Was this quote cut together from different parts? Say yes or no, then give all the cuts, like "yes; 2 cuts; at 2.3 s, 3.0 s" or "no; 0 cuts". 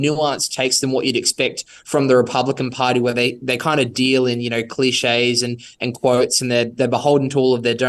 no; 0 cuts